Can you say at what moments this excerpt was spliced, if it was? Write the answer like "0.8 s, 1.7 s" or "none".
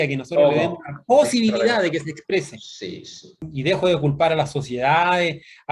3.5 s